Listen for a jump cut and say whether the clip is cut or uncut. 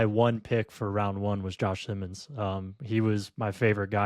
uncut